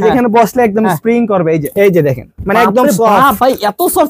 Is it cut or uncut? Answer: cut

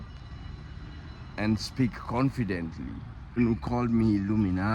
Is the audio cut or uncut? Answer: cut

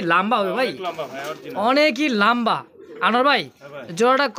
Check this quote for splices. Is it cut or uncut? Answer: uncut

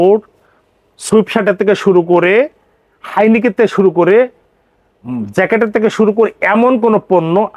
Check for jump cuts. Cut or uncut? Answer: uncut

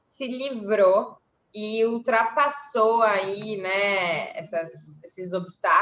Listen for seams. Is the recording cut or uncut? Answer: uncut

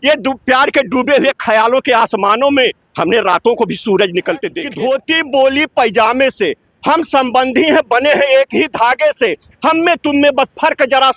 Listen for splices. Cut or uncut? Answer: cut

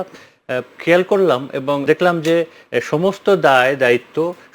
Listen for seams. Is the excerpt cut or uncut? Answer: cut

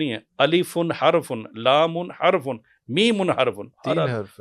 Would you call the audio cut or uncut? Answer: uncut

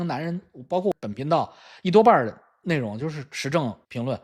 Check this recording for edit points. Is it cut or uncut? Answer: cut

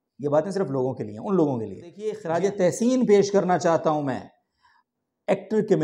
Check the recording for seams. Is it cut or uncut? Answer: cut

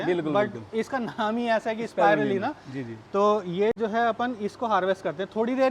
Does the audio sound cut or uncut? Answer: uncut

